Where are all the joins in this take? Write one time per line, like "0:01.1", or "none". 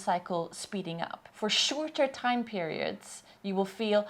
0:01.2